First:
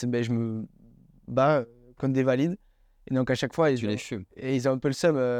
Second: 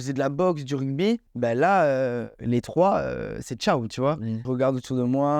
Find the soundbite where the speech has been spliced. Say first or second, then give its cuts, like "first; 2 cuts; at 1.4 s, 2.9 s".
second; 3 cuts; at 1.3 s, 2.3 s, 4.4 s